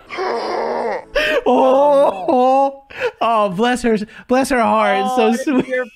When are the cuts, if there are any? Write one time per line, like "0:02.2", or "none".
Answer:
none